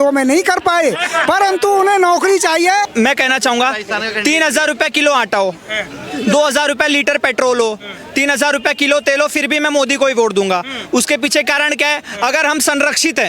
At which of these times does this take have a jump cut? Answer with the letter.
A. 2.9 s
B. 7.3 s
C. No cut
A